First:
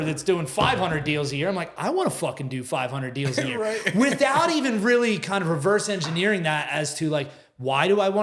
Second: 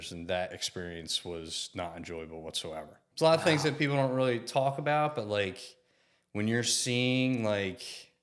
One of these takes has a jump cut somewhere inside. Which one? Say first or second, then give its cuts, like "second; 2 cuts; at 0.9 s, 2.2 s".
second; 1 cut; at 3.0 s